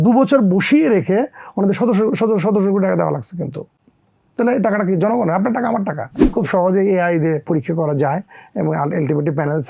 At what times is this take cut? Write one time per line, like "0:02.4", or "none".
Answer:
0:06.2